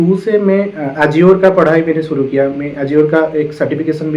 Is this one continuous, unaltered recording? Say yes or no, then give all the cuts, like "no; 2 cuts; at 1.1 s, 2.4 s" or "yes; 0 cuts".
yes; 0 cuts